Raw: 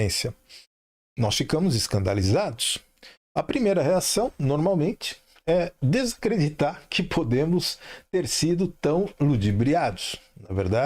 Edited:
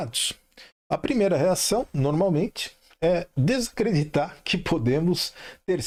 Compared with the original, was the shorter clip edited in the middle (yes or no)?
no